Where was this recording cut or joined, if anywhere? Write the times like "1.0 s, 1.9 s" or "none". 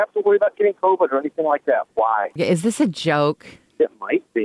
2.4 s